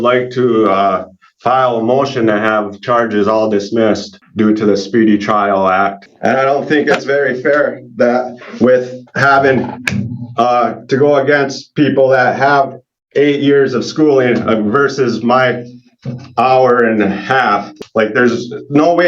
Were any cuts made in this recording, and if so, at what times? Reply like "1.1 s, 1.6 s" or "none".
4.2 s, 6.1 s, 17.7 s